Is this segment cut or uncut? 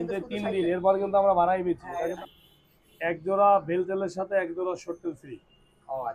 cut